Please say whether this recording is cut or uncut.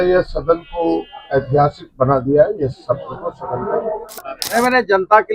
cut